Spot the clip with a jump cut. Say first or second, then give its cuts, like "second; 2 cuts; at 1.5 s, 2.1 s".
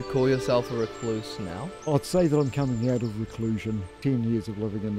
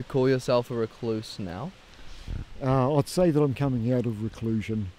first; 2 cuts; at 1.9 s, 3.9 s